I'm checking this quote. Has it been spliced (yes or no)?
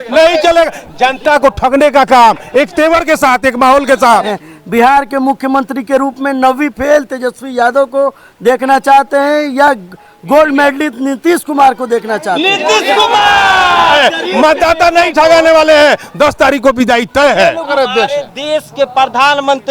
yes